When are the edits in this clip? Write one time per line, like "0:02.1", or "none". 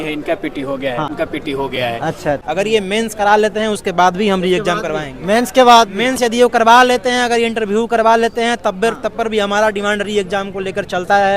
0:01.1
0:02.4